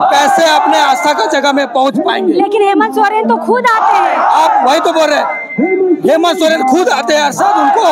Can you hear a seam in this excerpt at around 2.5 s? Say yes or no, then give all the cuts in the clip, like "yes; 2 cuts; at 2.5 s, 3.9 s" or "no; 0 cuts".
no; 0 cuts